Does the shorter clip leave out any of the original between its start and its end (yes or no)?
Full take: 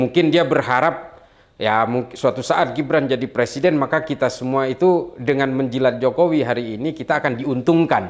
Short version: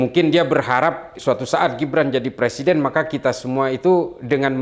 yes